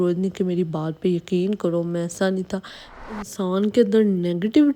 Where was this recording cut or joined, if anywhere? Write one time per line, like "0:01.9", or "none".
0:03.2